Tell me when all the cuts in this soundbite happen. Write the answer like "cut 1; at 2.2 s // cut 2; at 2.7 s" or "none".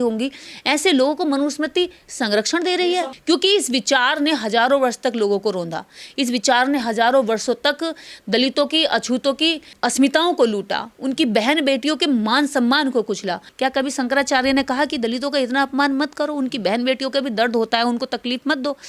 cut 1; at 3.1 s // cut 2; at 13.4 s